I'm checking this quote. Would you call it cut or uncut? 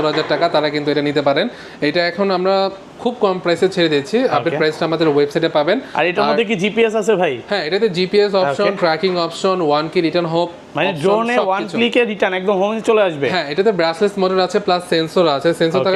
uncut